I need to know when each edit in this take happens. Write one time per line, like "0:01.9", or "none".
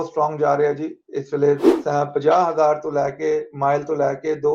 0:01.7